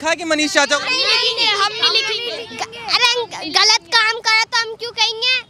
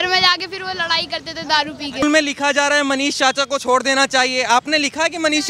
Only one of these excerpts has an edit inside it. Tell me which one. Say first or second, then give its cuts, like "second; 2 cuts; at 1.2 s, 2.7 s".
second; 1 cut; at 2.0 s